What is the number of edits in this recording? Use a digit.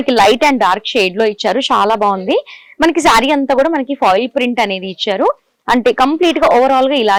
0